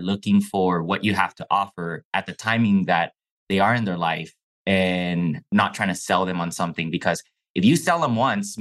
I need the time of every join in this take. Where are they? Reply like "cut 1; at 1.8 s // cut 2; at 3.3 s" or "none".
none